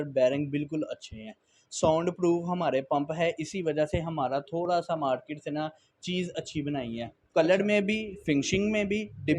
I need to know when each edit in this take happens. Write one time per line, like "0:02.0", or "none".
none